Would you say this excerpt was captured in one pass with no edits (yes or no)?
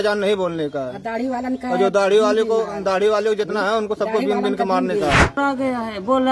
no